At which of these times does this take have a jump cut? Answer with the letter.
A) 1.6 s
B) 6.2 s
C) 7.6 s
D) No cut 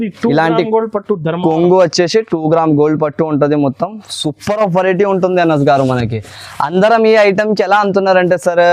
D